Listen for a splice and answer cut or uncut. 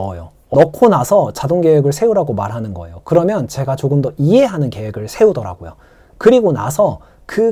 uncut